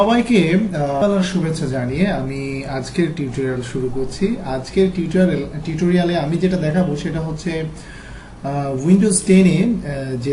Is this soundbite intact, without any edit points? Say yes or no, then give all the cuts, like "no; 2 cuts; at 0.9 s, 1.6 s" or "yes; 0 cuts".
no; 1 cut; at 1.0 s